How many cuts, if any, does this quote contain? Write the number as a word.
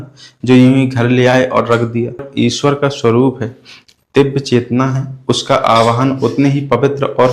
one